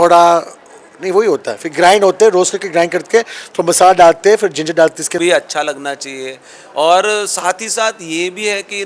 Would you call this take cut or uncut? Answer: cut